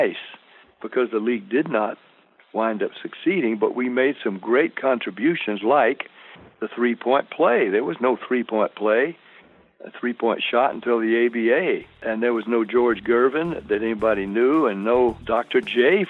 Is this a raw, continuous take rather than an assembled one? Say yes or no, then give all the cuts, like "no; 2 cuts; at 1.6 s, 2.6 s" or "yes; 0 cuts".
no; 2 cuts; at 12.0 s, 15.2 s